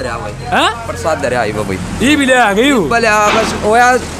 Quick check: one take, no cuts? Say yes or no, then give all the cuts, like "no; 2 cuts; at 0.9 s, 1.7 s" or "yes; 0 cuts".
yes; 0 cuts